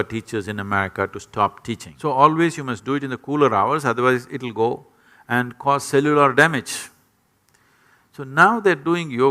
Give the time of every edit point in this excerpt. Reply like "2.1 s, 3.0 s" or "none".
1.9 s